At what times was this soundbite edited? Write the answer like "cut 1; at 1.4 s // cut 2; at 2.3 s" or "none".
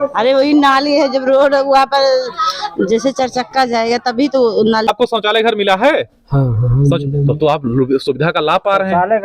cut 1; at 4.9 s